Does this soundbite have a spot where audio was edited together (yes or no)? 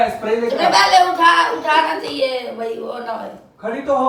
no